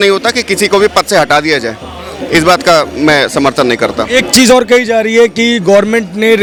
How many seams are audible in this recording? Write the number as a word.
zero